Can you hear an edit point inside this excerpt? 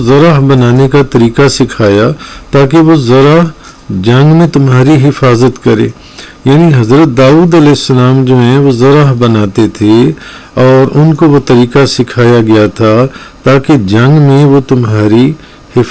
no; 0 cuts

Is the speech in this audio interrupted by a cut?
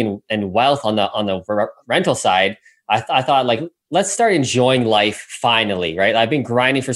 no; 0 cuts

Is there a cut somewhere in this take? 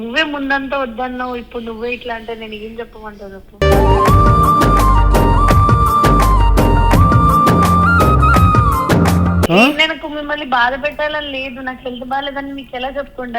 yes; 1 cut; at 9.5 s

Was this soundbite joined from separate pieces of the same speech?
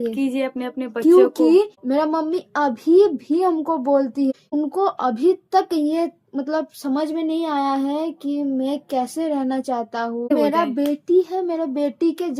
yes; 3 cuts; at 1.8 s, 4.4 s, 10.3 s

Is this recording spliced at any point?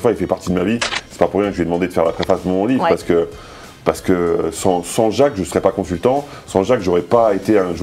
no; 0 cuts

